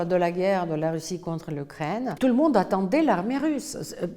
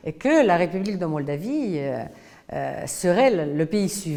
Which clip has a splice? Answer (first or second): first